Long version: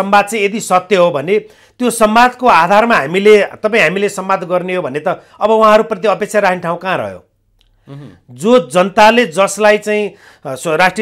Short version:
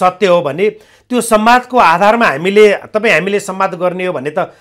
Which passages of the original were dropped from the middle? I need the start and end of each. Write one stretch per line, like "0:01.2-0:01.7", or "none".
none